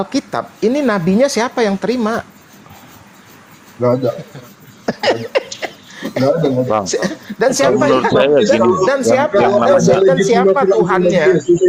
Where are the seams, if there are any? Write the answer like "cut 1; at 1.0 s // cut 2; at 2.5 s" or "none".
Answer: none